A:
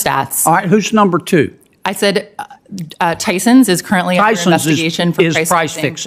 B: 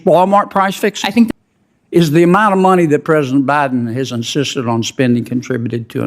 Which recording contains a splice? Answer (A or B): B